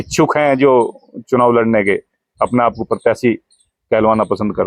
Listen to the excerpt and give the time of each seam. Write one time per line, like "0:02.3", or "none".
none